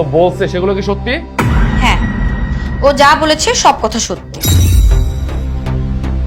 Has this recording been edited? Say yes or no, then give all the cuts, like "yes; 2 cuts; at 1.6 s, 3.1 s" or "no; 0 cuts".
no; 0 cuts